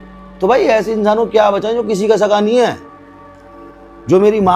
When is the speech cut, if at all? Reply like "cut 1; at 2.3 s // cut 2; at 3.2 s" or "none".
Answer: none